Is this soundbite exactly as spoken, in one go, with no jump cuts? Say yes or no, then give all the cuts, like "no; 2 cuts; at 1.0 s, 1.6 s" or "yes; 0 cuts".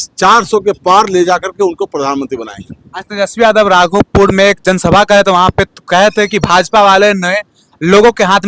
yes; 0 cuts